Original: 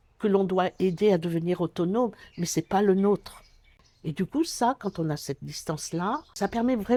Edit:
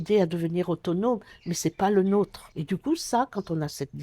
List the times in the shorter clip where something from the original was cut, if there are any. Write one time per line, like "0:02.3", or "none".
0:02.5